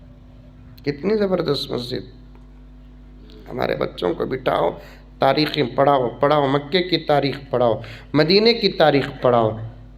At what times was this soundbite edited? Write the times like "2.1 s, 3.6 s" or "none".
none